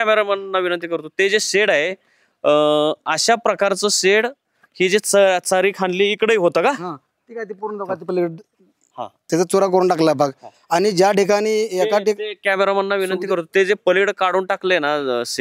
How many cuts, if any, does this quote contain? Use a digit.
0